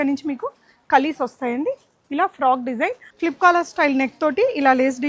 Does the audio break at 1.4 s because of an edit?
no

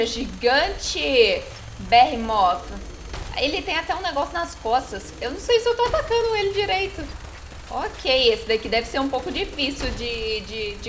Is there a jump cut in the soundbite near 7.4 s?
no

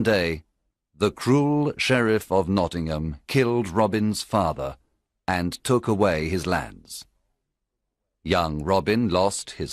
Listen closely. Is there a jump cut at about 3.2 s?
no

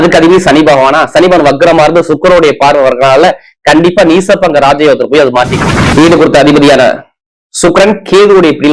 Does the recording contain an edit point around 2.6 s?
no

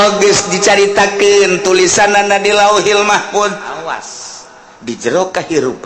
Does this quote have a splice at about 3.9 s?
yes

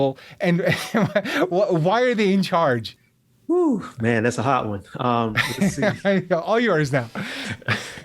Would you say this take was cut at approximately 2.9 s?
yes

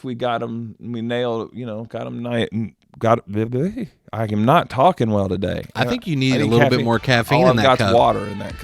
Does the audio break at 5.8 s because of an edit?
no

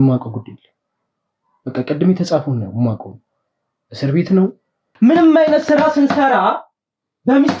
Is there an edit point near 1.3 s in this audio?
no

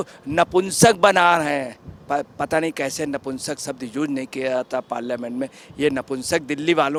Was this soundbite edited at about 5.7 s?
no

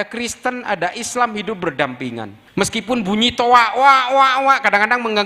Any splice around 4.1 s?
no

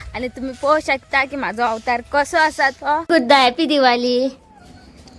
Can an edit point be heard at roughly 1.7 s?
no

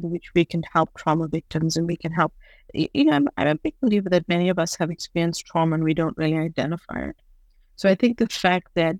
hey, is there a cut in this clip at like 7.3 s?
no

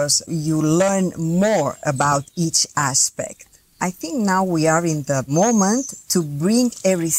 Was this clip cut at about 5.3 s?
yes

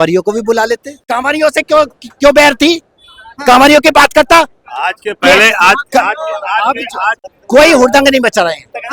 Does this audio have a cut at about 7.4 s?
yes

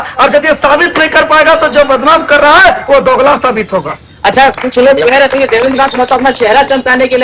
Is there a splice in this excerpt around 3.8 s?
no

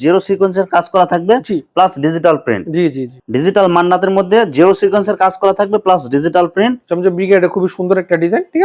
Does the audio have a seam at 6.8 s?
yes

